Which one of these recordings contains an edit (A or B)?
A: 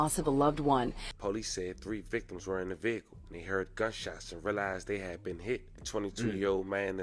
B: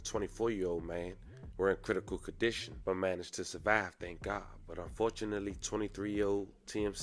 A